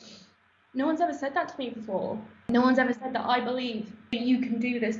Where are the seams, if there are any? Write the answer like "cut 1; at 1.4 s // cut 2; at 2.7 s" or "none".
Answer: cut 1; at 2.5 s // cut 2; at 4.0 s